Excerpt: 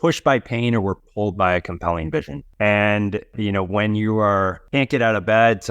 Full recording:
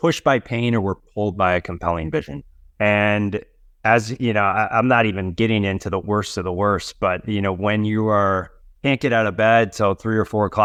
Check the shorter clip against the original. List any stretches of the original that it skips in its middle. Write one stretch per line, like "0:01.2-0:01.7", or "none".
0:02.4-0:02.6
0:03.5-0:07.2
0:08.5-0:08.7